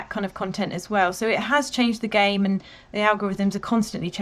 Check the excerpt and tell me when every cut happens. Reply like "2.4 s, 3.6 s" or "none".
none